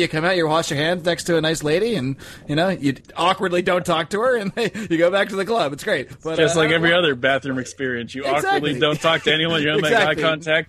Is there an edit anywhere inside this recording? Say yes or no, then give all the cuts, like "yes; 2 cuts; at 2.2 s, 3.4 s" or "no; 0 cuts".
yes; 2 cuts; at 3.0 s, 6.1 s